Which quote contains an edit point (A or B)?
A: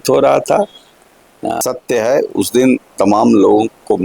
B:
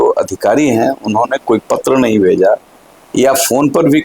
A